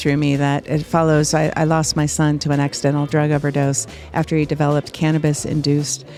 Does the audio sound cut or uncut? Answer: uncut